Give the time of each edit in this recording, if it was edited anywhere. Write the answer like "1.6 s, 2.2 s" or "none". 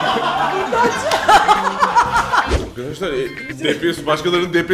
2.5 s